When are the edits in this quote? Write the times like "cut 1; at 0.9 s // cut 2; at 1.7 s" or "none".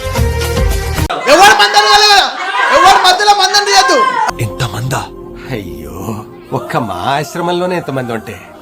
cut 1; at 1.1 s